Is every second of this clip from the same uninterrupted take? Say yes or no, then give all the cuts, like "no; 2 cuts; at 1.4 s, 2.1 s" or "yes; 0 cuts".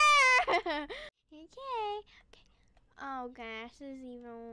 no; 1 cut; at 1.1 s